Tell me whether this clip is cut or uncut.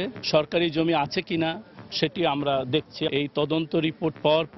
cut